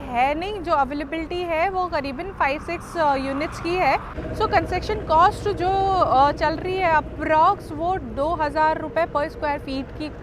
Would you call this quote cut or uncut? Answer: cut